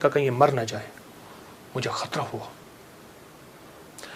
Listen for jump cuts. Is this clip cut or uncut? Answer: uncut